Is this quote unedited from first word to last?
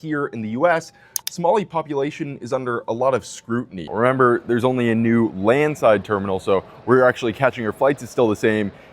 no; 1 cut; at 3.8 s

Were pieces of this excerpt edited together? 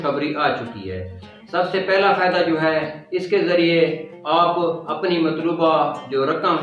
yes; 1 cut; at 1.3 s

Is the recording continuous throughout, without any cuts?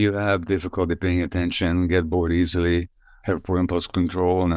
yes; 0 cuts

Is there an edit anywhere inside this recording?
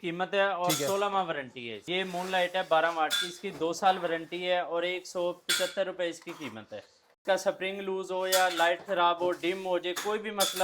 yes; 2 cuts; at 2.0 s, 7.1 s

